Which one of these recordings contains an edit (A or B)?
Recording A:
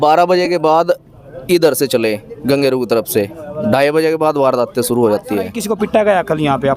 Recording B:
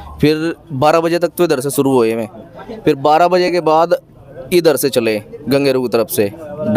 A